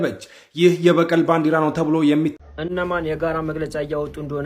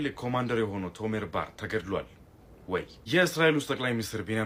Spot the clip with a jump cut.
first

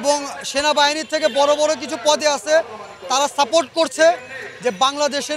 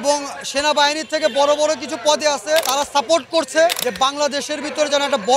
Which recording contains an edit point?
second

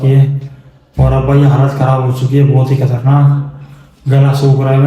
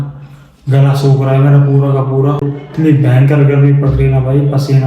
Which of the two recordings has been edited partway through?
second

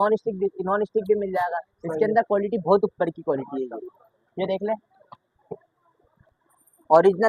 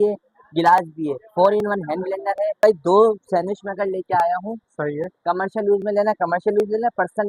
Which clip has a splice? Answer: second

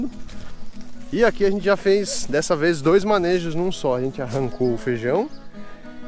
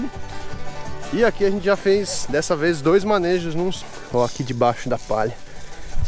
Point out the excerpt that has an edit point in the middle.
second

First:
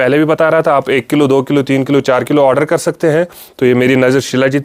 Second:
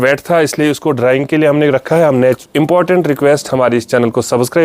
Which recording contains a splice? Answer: second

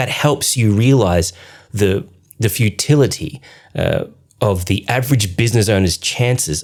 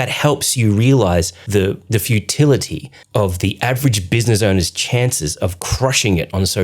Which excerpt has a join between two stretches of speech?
second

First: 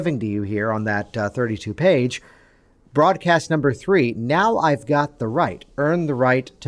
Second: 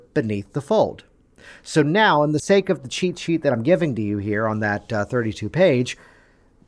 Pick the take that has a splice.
second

